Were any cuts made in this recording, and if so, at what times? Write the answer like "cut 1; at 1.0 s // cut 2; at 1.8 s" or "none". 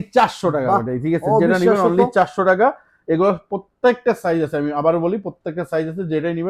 none

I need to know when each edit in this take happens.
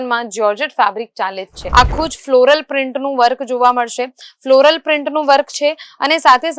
cut 1; at 1.6 s

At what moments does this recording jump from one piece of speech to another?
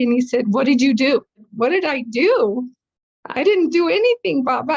cut 1; at 1.5 s

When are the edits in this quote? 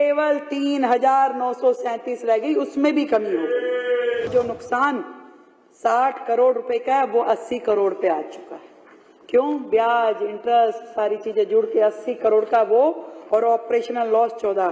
cut 1; at 4.3 s

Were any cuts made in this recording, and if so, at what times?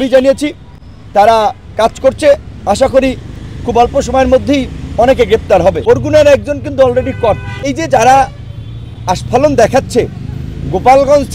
cut 1; at 5.8 s // cut 2; at 7.7 s

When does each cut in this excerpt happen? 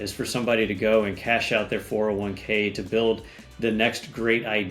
none

